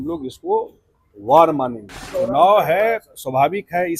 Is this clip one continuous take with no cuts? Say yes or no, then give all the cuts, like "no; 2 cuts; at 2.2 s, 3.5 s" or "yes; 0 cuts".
no; 1 cut; at 2.0 s